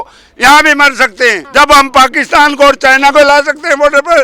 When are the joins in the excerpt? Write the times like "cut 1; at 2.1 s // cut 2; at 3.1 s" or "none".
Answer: cut 1; at 1.4 s